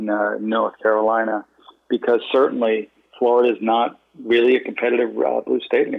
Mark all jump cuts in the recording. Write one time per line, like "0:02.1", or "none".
0:03.0
0:04.1